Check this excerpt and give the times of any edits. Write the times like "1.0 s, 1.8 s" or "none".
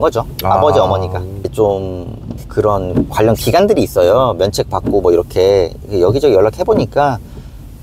1.5 s